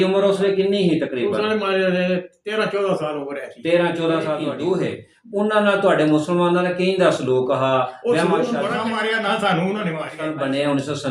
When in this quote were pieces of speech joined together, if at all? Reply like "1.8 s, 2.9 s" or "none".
4.5 s, 8.8 s, 10.2 s